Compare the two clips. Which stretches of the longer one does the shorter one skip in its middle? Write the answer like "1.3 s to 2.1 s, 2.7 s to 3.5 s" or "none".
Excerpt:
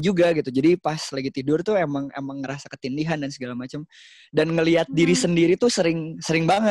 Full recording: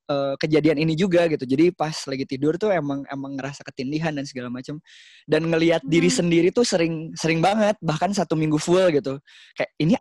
none